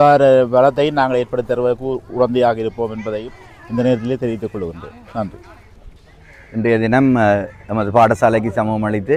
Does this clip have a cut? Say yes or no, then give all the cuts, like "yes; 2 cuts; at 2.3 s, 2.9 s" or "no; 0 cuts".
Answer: no; 0 cuts